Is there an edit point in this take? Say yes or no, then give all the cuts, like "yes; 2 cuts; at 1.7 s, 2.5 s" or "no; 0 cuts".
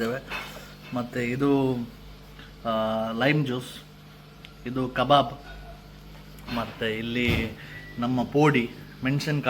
no; 0 cuts